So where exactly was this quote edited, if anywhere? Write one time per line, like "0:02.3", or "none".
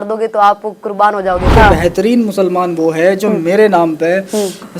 0:01.5